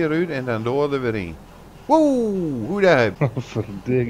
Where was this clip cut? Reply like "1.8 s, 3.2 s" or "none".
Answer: 3.1 s